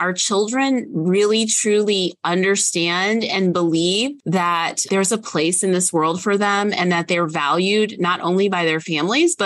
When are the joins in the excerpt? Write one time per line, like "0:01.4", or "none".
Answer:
0:04.2